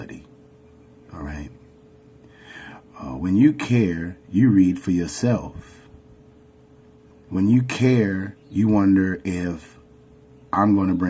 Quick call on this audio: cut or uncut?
cut